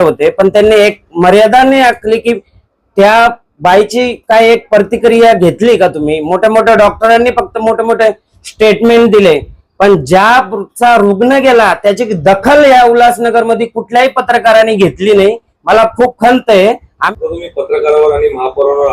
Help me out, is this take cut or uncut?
cut